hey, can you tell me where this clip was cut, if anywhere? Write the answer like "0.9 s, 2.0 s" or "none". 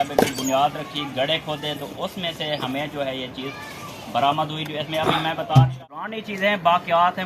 6.1 s